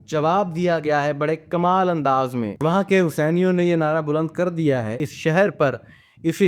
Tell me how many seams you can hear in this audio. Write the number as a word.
two